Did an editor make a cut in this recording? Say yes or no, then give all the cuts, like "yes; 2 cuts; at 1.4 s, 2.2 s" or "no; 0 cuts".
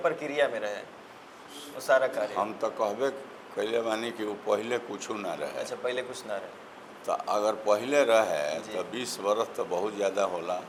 no; 0 cuts